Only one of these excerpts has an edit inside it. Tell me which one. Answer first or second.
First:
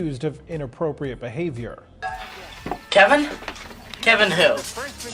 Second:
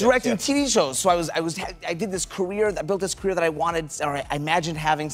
first